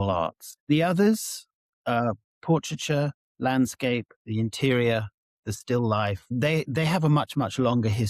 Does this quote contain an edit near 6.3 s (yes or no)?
yes